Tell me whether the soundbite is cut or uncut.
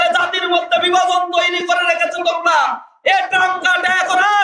uncut